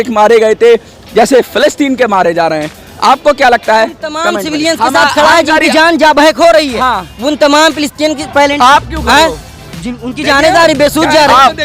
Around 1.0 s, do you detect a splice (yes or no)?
no